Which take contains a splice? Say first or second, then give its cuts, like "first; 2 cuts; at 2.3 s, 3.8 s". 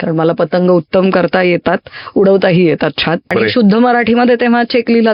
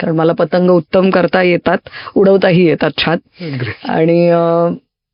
first; 1 cut; at 3.3 s